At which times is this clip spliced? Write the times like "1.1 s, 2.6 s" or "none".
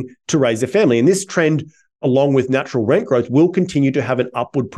2.0 s